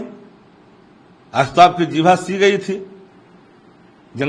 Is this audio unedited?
yes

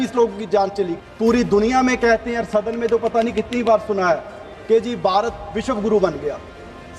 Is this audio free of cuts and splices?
no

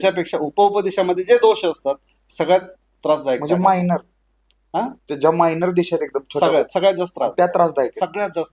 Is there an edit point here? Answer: no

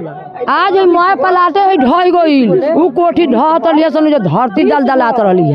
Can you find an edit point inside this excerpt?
no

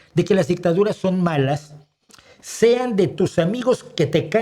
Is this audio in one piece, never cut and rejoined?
yes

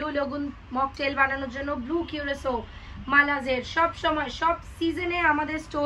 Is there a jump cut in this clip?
no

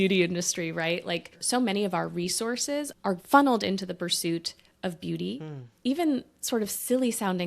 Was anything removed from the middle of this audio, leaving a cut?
yes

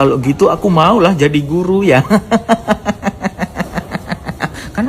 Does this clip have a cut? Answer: no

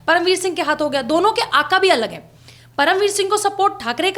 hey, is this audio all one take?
yes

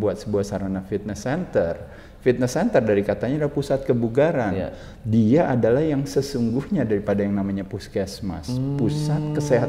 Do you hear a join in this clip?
no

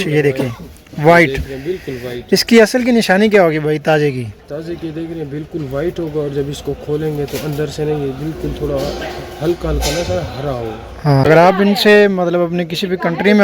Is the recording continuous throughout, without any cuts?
no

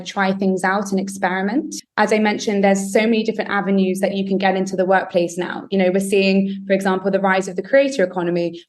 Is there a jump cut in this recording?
yes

